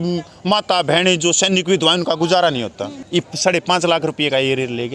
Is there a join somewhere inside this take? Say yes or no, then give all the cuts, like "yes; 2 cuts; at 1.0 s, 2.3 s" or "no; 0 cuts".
yes; 1 cut; at 3.0 s